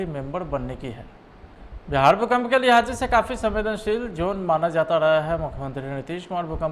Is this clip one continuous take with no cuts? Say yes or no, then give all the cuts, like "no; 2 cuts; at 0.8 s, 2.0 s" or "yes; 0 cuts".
no; 1 cut; at 1.6 s